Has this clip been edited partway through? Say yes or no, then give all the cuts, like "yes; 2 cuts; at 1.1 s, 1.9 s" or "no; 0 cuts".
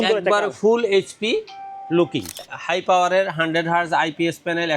yes; 1 cut; at 2.5 s